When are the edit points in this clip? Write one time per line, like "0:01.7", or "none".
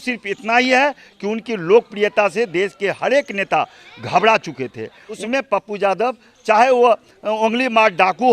0:05.1